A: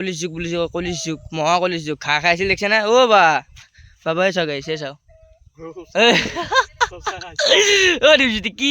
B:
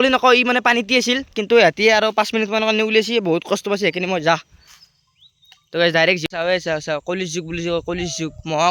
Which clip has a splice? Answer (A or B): B